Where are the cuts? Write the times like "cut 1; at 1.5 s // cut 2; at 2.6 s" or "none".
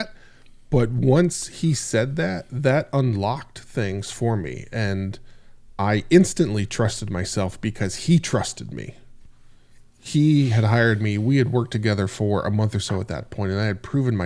none